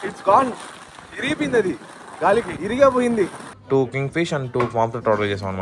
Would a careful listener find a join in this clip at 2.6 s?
yes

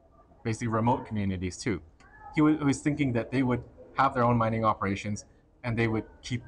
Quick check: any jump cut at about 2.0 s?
yes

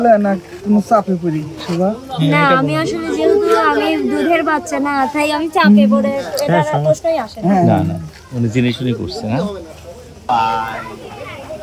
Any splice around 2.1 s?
no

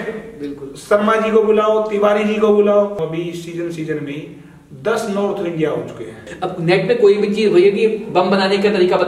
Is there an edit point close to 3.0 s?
yes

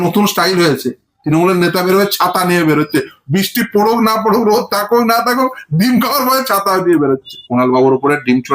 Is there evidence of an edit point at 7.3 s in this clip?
yes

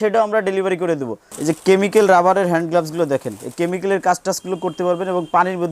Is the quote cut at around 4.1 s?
no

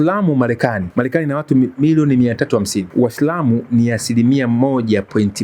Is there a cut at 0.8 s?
yes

